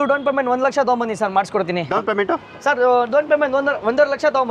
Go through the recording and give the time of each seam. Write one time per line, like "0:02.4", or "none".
0:01.9